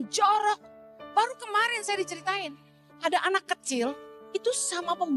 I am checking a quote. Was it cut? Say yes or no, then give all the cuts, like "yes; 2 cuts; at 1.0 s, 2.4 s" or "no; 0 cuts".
yes; 2 cuts; at 2.9 s, 4.1 s